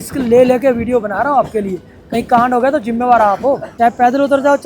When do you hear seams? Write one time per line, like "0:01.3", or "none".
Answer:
0:03.7